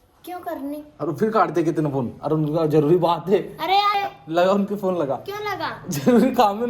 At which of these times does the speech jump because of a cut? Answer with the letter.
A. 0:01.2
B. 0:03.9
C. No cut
B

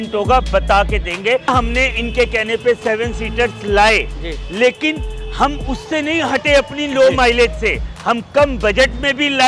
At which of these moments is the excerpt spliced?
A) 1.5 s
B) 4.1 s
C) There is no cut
A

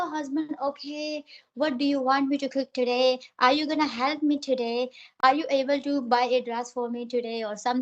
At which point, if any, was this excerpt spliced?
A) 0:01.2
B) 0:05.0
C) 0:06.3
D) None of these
B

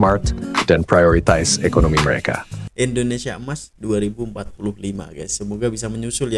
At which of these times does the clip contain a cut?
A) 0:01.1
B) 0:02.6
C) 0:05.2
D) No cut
B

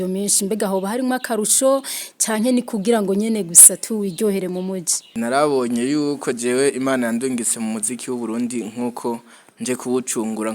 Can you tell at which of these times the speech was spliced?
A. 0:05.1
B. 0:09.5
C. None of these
A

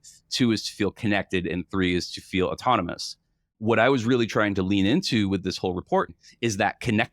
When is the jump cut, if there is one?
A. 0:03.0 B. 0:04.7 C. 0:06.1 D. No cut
C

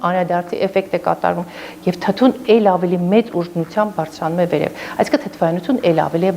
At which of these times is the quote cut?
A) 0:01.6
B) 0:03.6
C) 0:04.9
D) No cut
D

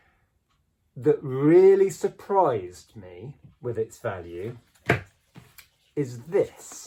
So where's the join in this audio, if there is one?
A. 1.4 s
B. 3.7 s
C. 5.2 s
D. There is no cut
D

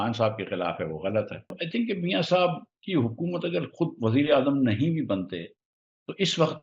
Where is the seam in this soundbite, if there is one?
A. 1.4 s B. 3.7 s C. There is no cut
A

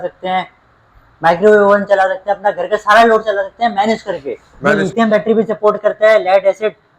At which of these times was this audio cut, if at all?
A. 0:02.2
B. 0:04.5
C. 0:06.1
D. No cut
B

